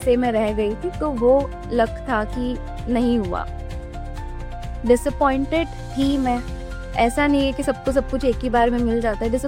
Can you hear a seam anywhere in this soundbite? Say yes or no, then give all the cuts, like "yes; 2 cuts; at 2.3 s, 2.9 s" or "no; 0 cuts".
no; 0 cuts